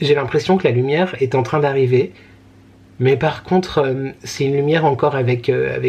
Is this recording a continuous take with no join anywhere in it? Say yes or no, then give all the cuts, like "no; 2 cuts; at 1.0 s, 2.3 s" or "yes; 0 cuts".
yes; 0 cuts